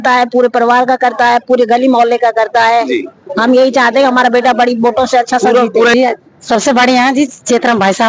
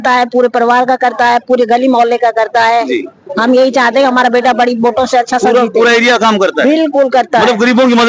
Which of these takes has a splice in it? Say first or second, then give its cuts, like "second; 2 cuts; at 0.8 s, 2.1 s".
first; 1 cut; at 5.9 s